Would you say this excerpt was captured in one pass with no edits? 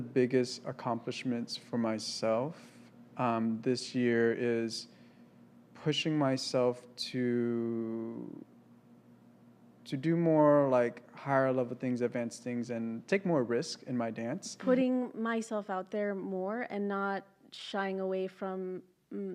no; 1 cut; at 14.5 s

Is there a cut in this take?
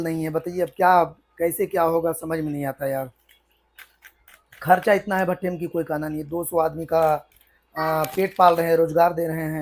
no; 0 cuts

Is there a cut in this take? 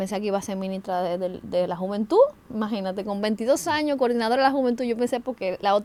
no; 0 cuts

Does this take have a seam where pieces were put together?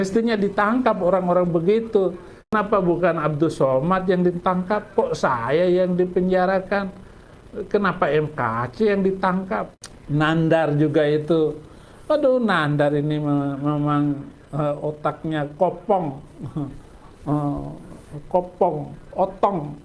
yes; 2 cuts; at 2.5 s, 9.7 s

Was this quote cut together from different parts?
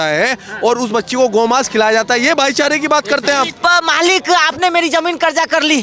yes; 1 cut; at 3.5 s

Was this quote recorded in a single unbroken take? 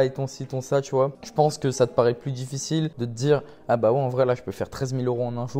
no; 2 cuts; at 1.2 s, 3.0 s

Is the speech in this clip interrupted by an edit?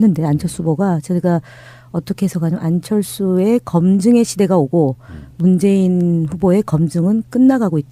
yes; 1 cut; at 2.6 s

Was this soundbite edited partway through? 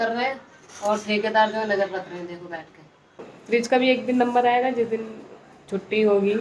yes; 1 cut; at 3.3 s

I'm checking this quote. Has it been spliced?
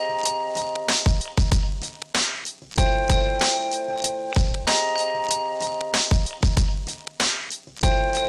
no; 0 cuts

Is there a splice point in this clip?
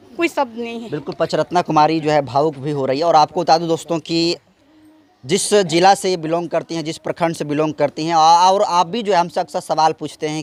no; 0 cuts

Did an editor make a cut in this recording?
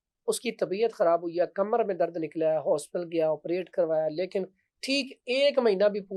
no; 0 cuts

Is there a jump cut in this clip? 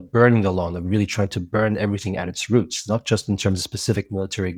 no; 0 cuts

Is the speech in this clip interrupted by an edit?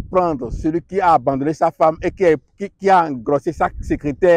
no; 0 cuts

